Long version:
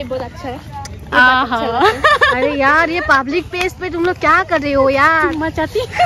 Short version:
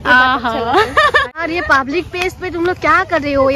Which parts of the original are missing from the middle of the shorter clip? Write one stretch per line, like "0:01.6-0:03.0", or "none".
0:02.4-0:02.7